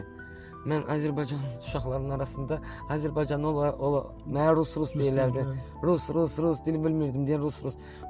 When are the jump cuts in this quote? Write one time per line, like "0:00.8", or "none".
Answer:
none